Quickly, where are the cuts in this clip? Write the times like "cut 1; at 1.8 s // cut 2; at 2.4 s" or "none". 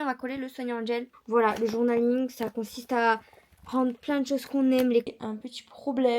cut 1; at 1.1 s // cut 2; at 5.1 s